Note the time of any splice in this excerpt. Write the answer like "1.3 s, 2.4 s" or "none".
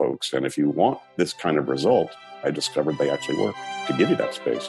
1.0 s, 2.2 s, 3.8 s

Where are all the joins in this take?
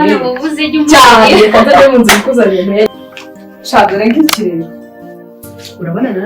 2.9 s

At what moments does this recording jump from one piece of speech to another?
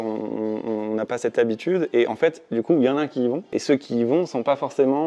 3.5 s

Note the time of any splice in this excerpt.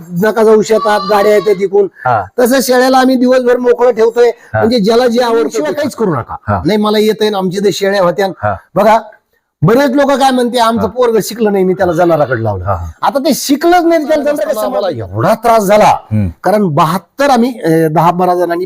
5.6 s, 14.6 s

